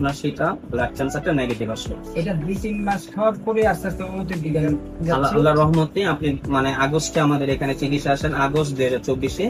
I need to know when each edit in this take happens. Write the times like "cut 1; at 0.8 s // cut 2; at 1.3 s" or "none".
none